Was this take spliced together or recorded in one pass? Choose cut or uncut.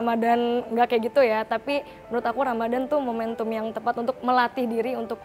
uncut